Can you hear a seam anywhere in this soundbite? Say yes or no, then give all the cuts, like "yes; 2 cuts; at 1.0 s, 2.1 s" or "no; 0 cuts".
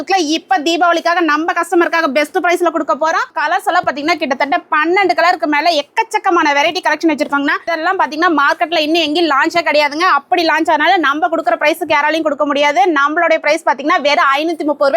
yes; 2 cuts; at 3.3 s, 7.7 s